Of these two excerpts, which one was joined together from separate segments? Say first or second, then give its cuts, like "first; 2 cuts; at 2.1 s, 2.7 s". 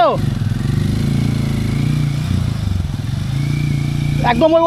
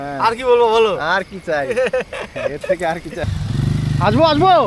second; 1 cut; at 3.2 s